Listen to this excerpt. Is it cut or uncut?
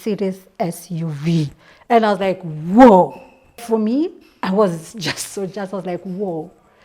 cut